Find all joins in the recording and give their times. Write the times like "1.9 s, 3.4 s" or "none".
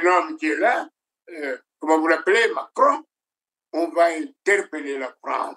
none